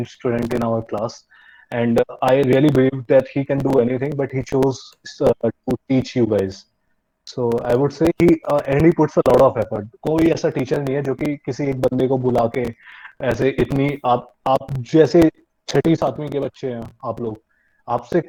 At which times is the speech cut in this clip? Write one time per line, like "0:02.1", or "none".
none